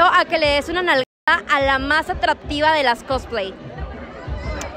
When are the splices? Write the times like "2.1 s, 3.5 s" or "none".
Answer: none